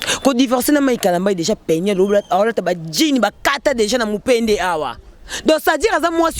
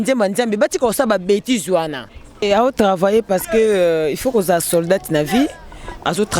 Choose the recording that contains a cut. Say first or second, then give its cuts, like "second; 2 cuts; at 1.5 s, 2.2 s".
second; 1 cut; at 2.4 s